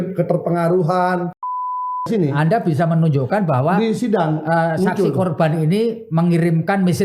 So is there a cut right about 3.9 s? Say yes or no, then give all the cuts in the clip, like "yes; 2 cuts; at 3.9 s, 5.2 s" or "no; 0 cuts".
no; 1 cut; at 1.8 s